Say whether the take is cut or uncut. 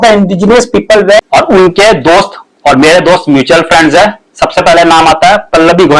cut